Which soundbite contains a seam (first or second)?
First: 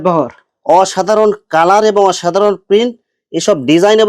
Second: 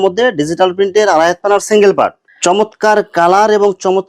second